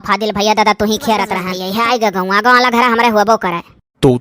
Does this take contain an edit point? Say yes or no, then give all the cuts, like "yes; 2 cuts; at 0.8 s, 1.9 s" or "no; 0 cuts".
yes; 1 cut; at 1.5 s